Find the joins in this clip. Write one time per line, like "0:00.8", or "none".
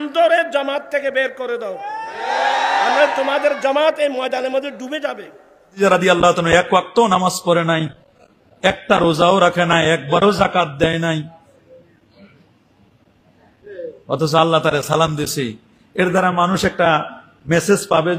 0:05.8